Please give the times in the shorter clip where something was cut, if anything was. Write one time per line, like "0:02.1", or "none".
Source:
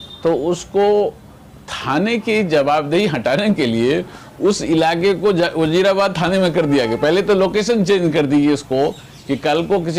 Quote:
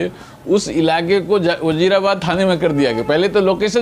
none